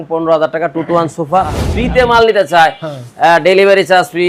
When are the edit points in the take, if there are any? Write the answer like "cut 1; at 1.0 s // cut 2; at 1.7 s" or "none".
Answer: cut 1; at 1.7 s